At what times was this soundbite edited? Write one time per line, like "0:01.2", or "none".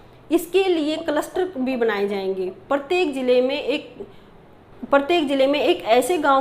none